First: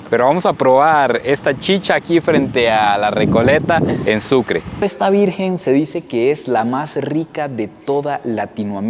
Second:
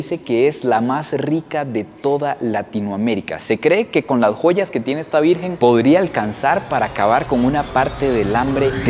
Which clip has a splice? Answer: first; 1 cut; at 4.8 s

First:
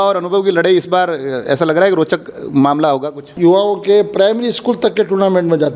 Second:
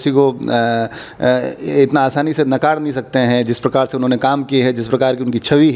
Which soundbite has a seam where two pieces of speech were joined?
first; 1 cut; at 3.3 s

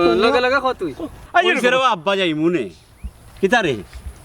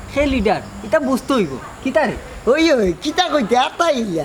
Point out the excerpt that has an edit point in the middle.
first; 1 cut; at 1.2 s

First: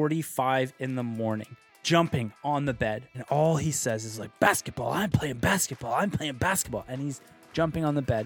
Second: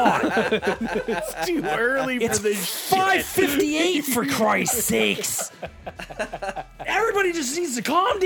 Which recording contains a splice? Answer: first; 2 cuts; at 1.7 s, 3.1 s

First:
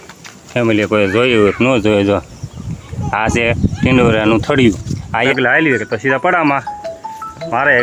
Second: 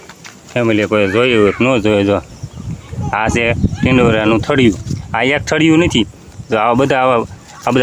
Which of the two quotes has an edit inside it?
first; 1 cut; at 5.3 s

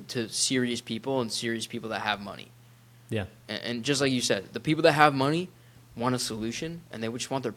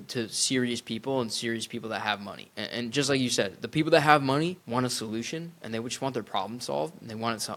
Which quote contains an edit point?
second; 2 cuts; at 2.5 s, 4.6 s

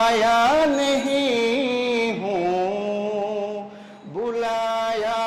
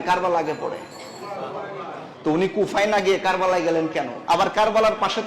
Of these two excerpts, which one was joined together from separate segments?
second; 1 cut; at 4.1 s

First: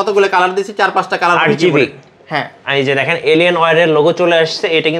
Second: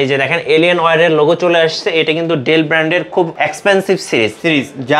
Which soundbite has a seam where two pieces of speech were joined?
second; 1 cut; at 3.3 s

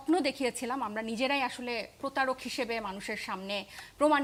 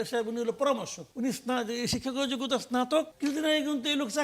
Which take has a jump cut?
second; 2 cuts; at 1.0 s, 3.1 s

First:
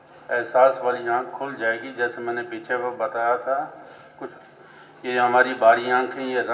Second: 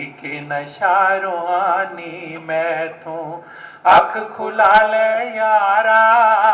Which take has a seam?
first; 1 cut; at 4.3 s

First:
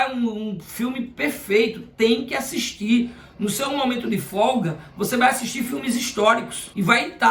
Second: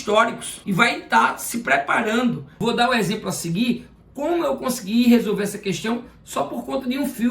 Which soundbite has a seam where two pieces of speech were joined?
second; 1 cut; at 2.6 s

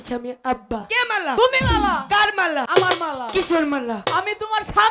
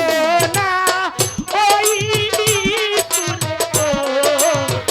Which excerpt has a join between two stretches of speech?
first; 3 cuts; at 0.9 s, 2.7 s, 4.0 s

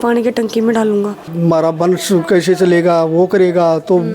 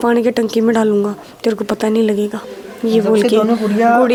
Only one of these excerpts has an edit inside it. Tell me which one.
first; 1 cut; at 1.3 s

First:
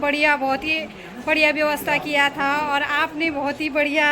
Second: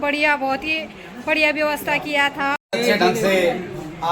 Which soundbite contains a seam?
second; 1 cut; at 2.6 s

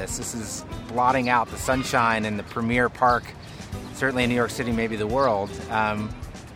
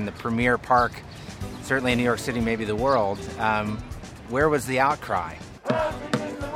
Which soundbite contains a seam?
second; 1 cut; at 5.5 s

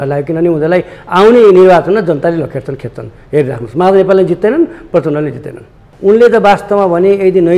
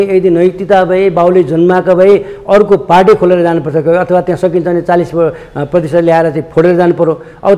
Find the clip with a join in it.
first; 1 cut; at 5.8 s

